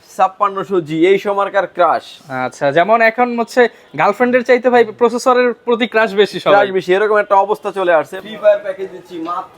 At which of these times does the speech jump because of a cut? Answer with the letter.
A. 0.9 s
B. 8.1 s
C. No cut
B